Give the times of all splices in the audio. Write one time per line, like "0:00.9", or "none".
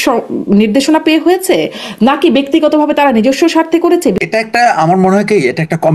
0:04.2